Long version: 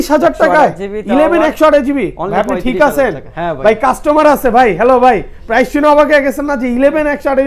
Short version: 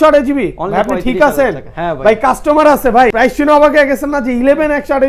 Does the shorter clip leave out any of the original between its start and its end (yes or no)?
yes